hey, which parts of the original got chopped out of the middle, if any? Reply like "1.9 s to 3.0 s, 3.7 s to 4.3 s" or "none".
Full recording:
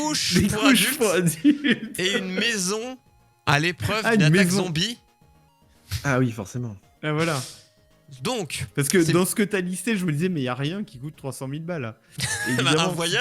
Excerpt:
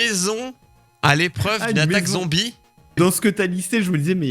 5.4 s to 9.1 s